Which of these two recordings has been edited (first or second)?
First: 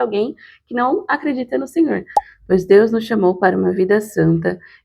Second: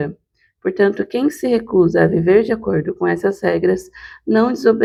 first